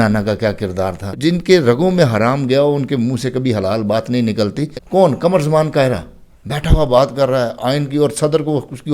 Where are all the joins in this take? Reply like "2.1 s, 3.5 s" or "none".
1.1 s, 4.7 s